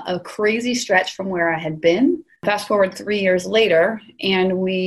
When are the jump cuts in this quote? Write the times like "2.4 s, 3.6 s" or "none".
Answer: 2.4 s